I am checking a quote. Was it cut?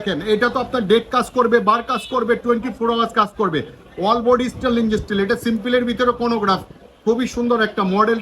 no; 0 cuts

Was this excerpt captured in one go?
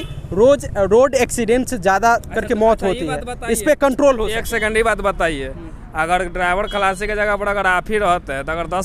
yes; 0 cuts

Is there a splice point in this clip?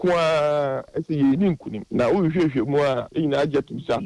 no; 0 cuts

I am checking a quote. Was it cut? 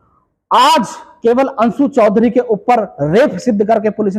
no; 0 cuts

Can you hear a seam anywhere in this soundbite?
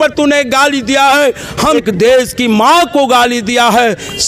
yes; 1 cut; at 1.8 s

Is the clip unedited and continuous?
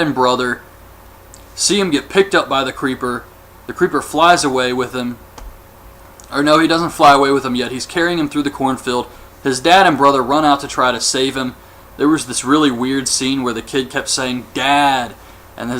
no; 1 cut; at 14.8 s

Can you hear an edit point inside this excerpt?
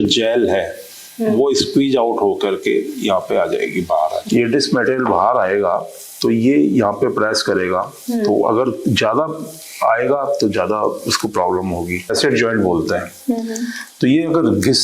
yes; 2 cuts; at 4.2 s, 12.1 s

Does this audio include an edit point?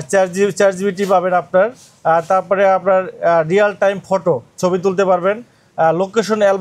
no; 0 cuts

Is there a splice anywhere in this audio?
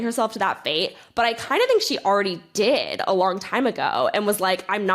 no; 0 cuts

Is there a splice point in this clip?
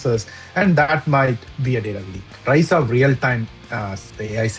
yes; 1 cut; at 2.3 s

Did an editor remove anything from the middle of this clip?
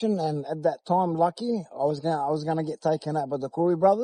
no; 0 cuts

